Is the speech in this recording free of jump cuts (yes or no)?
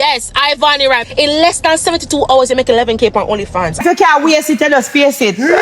no